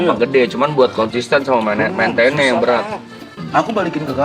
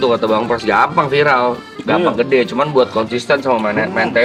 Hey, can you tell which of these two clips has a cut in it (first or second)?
first